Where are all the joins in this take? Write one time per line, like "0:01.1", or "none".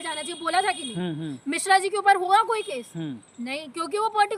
none

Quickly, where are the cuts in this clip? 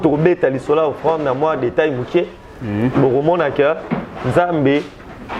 none

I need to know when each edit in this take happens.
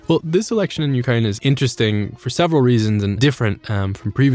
0:01.4
0:03.2

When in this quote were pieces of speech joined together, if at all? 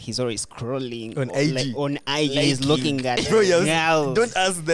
none

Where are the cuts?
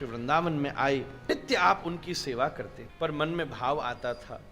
0:01.2
0:02.8

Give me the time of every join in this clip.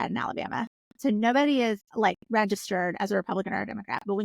0:01.9

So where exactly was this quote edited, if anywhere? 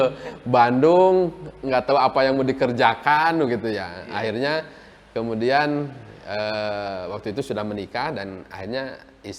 none

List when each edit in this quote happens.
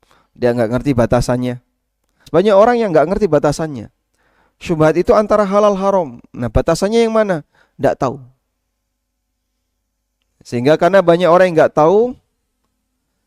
0:02.2

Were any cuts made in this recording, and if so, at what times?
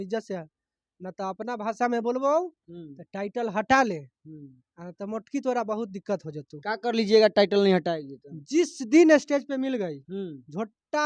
none

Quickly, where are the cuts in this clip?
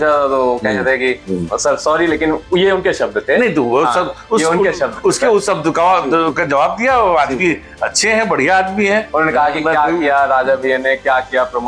none

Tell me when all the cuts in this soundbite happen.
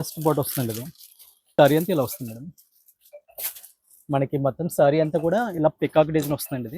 0:01.4

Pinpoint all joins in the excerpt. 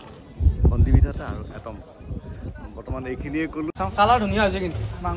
0:03.7

